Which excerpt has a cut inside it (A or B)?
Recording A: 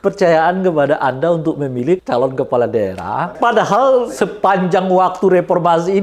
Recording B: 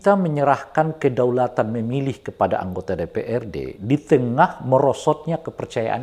A